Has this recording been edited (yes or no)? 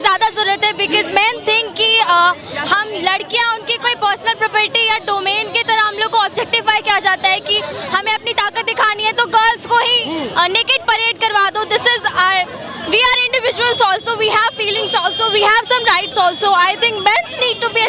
no